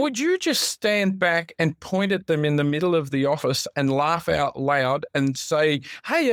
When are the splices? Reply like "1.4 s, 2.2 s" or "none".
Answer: none